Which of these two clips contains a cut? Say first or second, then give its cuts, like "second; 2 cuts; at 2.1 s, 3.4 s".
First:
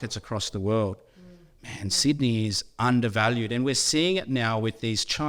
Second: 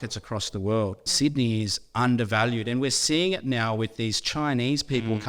second; 1 cut; at 1.0 s